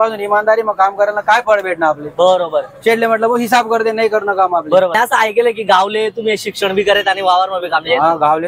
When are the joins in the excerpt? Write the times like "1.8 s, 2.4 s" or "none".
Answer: 4.9 s